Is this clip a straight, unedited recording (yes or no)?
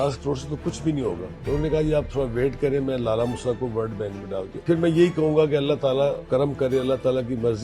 no